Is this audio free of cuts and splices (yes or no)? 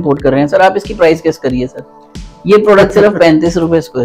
no